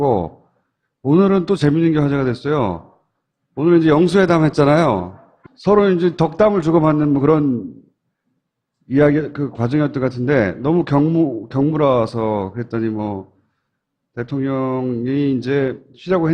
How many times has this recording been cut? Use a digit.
0